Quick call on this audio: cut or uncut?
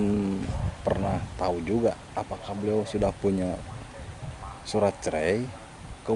uncut